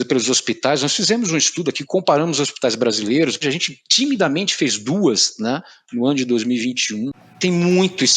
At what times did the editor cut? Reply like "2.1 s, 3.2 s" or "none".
3.4 s, 7.2 s

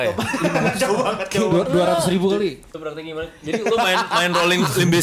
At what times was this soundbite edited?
2.6 s

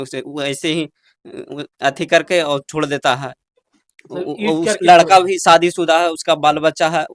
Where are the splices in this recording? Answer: none

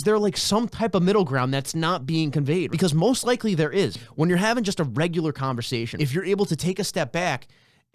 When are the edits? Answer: 2.7 s, 4.0 s, 5.9 s

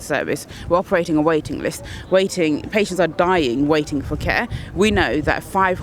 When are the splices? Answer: 4.5 s

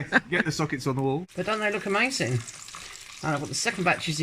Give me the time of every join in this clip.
1.3 s

